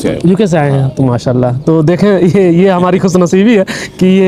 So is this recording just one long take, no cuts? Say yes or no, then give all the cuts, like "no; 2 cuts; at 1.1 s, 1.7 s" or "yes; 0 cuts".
yes; 0 cuts